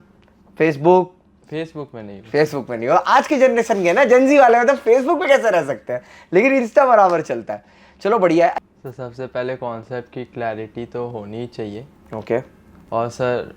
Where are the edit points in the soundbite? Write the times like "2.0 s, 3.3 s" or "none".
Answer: 8.6 s